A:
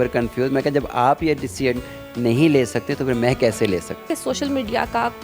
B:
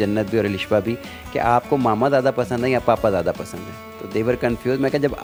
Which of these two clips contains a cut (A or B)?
A